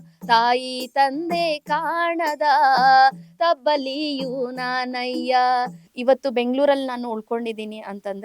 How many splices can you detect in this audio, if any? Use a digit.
1